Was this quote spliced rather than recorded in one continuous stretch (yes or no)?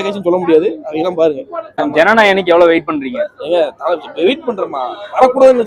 yes